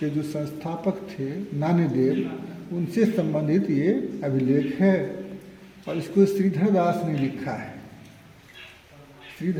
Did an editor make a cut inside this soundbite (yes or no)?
no